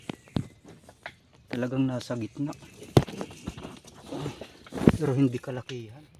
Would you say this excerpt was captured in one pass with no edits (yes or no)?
yes